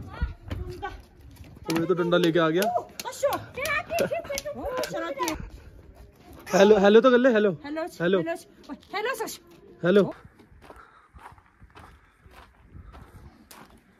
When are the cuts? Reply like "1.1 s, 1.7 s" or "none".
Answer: 5.4 s, 10.1 s